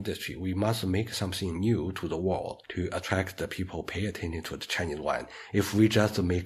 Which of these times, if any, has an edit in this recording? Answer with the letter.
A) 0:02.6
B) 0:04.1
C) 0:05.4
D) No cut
A